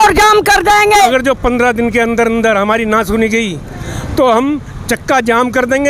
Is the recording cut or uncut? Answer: cut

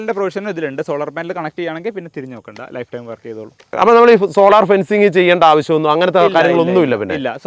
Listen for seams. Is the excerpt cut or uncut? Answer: cut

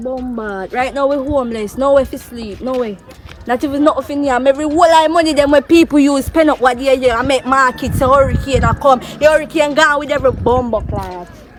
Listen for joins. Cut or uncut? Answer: uncut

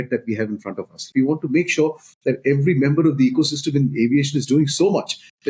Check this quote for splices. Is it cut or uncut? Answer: cut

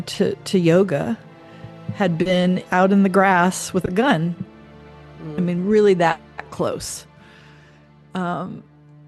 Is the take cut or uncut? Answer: uncut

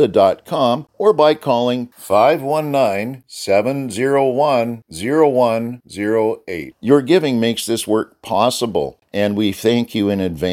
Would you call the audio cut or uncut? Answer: cut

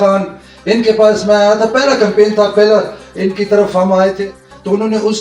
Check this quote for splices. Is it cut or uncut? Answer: cut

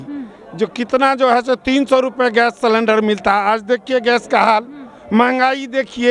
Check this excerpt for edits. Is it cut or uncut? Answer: uncut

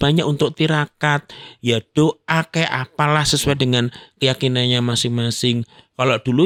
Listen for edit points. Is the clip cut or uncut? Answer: uncut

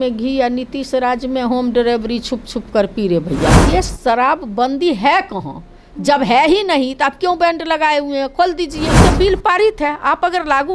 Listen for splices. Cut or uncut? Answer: cut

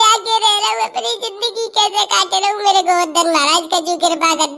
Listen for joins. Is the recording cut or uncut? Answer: uncut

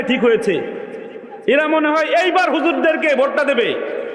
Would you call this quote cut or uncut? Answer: uncut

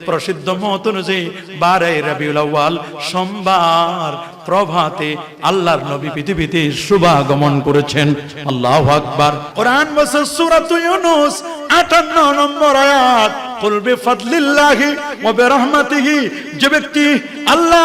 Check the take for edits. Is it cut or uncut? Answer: cut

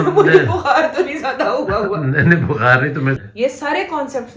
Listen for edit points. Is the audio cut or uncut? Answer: cut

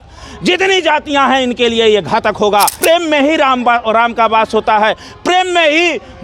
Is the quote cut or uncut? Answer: cut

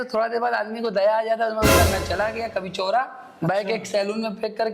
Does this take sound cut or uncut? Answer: cut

